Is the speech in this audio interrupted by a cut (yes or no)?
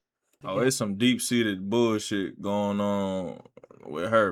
no